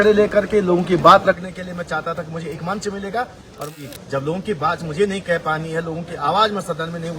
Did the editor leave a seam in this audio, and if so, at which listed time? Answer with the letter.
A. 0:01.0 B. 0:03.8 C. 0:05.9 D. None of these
B